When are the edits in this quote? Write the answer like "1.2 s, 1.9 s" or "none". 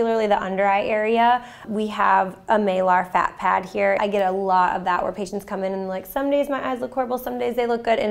1.6 s, 4.0 s